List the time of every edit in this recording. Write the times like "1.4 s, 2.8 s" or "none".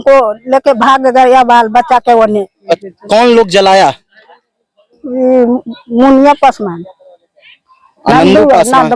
2.8 s